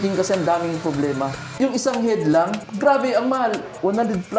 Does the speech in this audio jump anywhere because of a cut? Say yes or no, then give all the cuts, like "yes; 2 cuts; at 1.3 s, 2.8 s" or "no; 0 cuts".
yes; 2 cuts; at 1.4 s, 2.7 s